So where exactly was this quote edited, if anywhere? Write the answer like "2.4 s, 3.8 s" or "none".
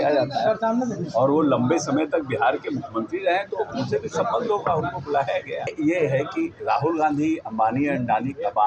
5.7 s